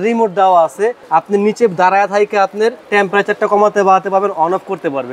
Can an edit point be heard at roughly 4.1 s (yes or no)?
no